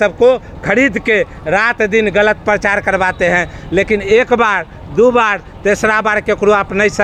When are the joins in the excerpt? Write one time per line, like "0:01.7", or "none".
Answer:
none